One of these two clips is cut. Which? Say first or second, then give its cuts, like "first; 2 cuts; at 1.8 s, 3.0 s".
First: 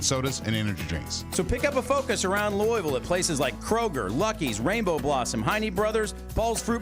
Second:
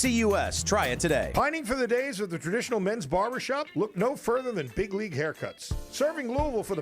second; 1 cut; at 1.3 s